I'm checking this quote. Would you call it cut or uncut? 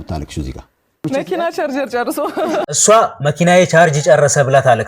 cut